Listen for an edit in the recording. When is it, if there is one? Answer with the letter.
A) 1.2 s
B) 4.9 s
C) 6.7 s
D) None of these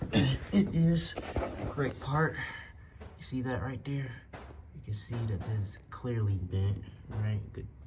D